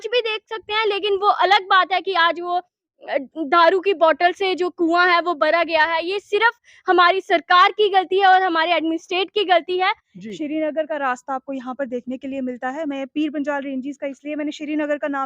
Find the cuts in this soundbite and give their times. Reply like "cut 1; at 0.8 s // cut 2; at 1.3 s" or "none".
cut 1; at 10.1 s